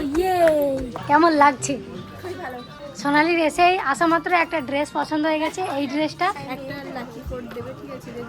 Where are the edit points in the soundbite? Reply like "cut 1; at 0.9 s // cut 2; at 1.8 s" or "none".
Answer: cut 1; at 0.9 s // cut 2; at 2.8 s // cut 3; at 6.4 s